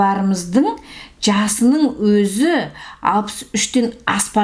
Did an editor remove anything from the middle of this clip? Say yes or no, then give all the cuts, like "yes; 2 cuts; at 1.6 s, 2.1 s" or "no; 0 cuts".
no; 0 cuts